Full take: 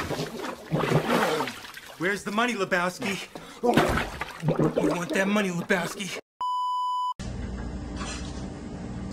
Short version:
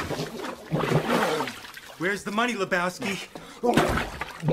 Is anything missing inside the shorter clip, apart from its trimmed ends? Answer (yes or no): no